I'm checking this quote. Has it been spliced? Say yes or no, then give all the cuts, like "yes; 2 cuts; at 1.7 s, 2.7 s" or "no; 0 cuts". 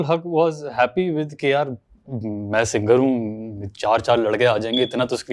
no; 0 cuts